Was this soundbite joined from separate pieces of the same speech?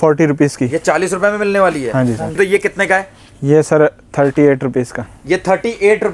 yes; 1 cut; at 2.3 s

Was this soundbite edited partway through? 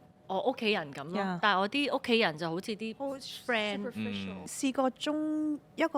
yes; 1 cut; at 4.4 s

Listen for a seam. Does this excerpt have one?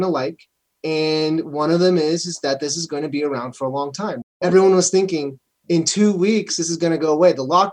no; 0 cuts

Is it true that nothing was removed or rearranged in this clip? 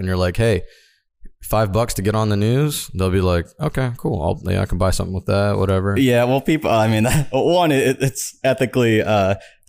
no; 1 cut; at 5.9 s

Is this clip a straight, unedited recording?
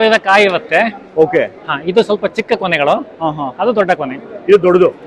yes; 0 cuts

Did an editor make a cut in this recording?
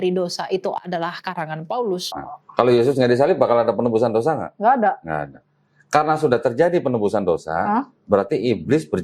yes; 1 cut; at 2.1 s

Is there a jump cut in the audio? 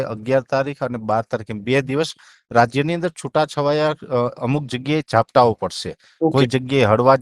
no; 0 cuts

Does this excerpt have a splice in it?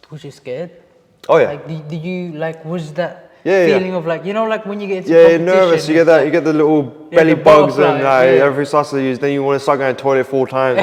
no; 0 cuts

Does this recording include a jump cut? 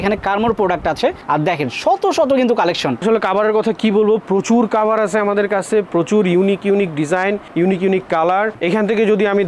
yes; 2 cuts; at 3.0 s, 8.6 s

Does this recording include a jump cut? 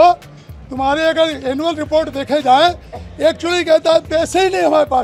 no; 0 cuts

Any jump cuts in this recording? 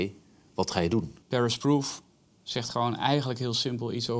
yes; 1 cut; at 1.2 s

